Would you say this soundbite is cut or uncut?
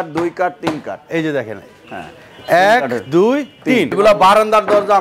cut